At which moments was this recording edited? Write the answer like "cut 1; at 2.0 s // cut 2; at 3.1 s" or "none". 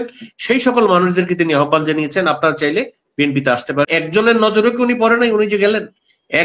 cut 1; at 3.9 s